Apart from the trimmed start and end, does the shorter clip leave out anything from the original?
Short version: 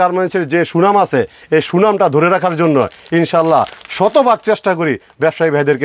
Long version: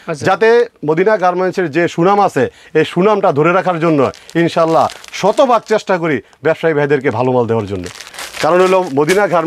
no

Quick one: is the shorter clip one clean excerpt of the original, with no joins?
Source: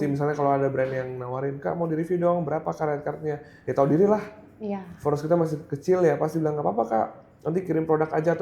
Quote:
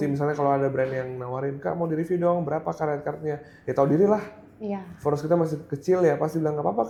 yes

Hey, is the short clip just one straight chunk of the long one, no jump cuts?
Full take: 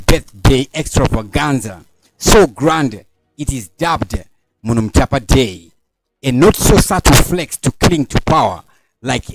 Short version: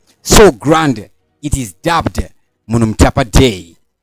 yes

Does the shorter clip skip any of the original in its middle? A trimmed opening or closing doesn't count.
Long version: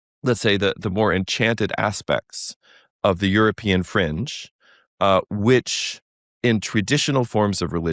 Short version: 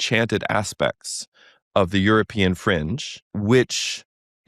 yes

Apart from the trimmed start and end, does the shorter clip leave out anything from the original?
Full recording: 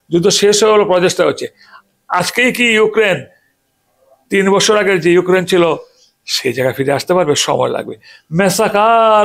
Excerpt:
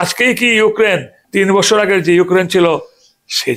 yes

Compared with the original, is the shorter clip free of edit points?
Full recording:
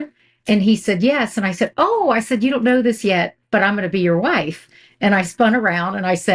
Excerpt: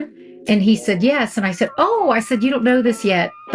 yes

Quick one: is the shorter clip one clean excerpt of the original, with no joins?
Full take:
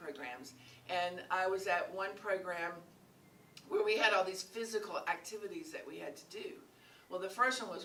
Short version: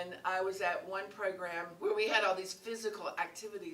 no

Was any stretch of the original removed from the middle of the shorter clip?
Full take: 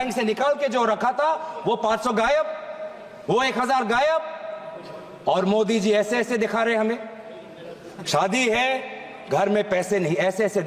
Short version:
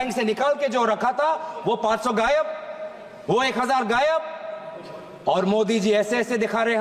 no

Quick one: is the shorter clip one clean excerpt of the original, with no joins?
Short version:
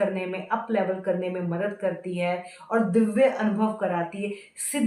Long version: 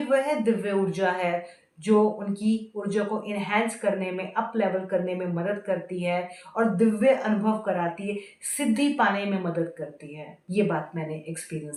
yes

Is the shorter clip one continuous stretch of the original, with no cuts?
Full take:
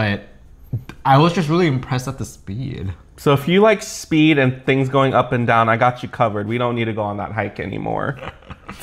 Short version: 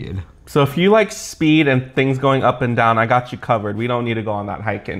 yes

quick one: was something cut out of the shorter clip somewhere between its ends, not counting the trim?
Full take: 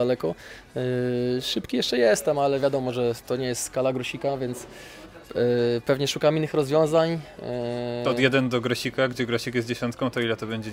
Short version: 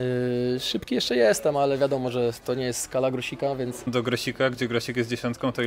yes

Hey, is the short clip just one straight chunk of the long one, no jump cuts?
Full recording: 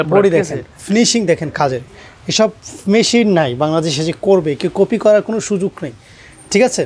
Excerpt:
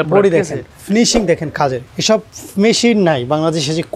no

